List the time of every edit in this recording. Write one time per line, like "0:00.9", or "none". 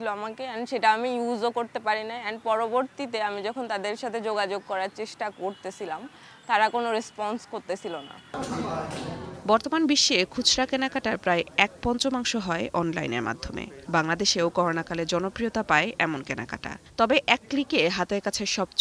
none